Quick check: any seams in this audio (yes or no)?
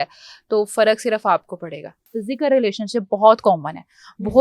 yes